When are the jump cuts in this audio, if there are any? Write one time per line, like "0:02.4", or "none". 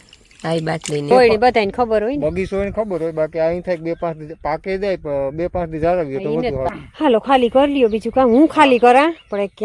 0:01.1
0:06.7